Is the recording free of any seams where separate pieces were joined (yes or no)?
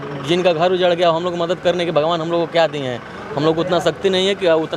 yes